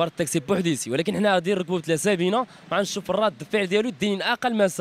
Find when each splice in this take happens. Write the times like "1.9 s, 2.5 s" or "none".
none